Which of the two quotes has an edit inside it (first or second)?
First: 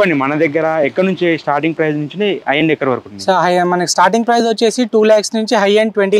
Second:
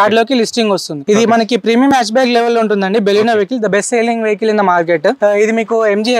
second